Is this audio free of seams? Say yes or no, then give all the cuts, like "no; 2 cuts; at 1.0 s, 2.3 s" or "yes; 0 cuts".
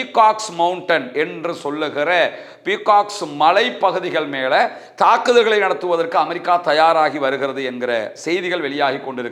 yes; 0 cuts